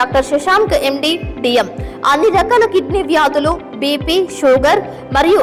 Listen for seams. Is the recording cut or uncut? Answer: uncut